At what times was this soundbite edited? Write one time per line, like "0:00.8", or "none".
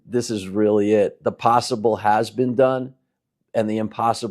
none